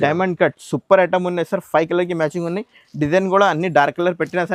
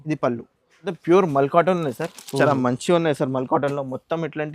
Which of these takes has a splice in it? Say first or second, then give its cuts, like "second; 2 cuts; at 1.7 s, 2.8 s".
second; 1 cut; at 0.9 s